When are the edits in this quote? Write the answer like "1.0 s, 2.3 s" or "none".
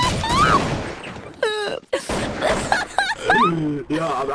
1.8 s